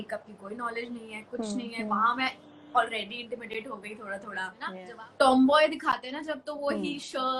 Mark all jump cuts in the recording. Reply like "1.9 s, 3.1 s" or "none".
4.6 s